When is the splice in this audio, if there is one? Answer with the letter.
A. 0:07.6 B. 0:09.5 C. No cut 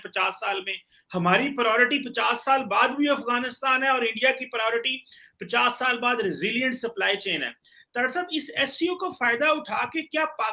C